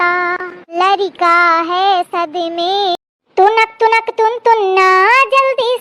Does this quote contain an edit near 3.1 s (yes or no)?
yes